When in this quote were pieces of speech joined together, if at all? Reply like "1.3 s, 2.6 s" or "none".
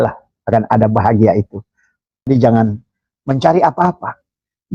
2.3 s